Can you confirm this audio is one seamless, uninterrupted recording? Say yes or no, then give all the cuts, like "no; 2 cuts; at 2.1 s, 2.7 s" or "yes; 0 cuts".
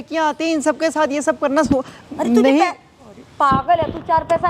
yes; 0 cuts